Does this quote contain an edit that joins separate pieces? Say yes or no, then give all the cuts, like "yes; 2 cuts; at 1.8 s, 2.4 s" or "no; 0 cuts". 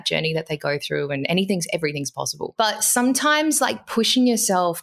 yes; 1 cut; at 2.4 s